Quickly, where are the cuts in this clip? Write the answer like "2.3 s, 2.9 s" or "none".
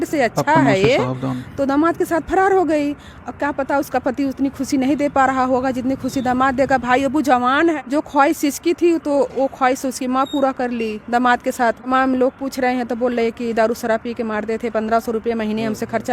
7.8 s, 11.9 s